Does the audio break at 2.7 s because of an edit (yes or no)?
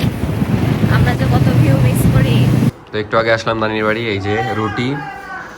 yes